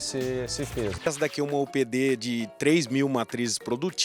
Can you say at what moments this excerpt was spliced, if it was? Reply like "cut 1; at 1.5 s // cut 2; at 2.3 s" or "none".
cut 1; at 1.0 s